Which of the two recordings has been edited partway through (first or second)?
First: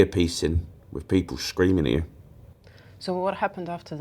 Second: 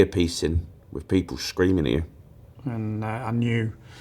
second